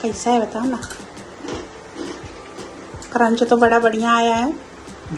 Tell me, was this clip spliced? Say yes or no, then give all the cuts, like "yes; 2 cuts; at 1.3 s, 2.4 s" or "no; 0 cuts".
no; 0 cuts